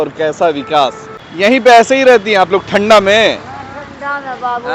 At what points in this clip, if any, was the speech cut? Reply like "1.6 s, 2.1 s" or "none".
none